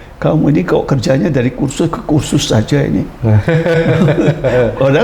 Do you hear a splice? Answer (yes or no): no